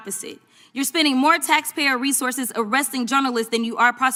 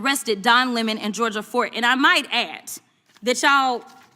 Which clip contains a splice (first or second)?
second